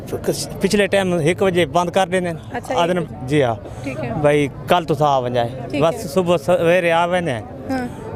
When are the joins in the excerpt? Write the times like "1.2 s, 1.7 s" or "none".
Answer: none